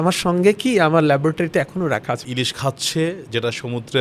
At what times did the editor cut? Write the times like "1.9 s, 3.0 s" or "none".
2.2 s